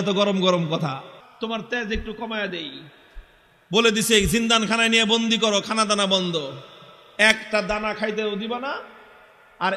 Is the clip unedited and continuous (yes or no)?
no